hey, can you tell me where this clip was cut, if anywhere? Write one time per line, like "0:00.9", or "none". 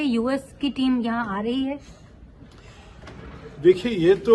none